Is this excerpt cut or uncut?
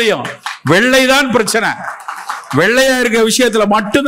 uncut